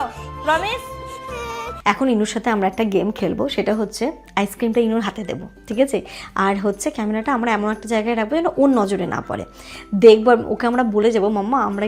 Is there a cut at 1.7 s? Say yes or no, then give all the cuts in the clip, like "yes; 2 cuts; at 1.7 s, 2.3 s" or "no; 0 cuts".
yes; 1 cut; at 1.7 s